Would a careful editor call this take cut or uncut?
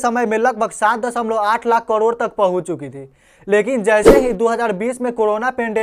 uncut